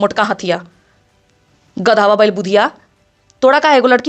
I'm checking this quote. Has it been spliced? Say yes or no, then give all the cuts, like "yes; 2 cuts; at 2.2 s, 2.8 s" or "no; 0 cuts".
no; 0 cuts